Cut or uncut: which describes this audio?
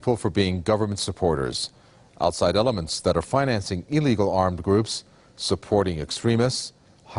uncut